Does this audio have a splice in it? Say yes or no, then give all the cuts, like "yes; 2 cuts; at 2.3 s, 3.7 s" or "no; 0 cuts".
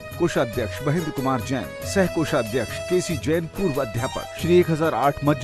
yes; 2 cuts; at 2.8 s, 4.3 s